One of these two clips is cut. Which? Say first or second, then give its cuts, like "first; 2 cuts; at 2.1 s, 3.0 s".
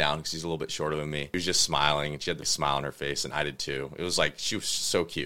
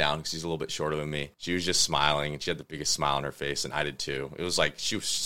first; 2 cuts; at 1.3 s, 2.5 s